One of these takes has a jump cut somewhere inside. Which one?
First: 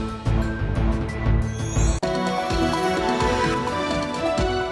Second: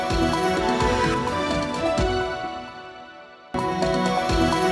second; 1 cut; at 3.8 s

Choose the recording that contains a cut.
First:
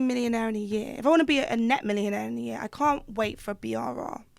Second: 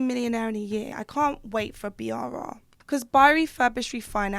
second; 2 cuts; at 0.9 s, 2.7 s

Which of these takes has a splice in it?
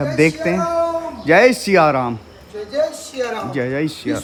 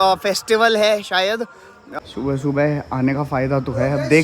second; 1 cut; at 1.9 s

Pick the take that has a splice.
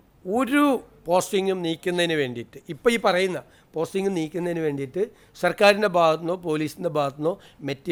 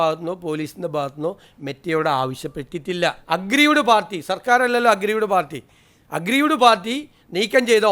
second; 1 cut; at 3.2 s

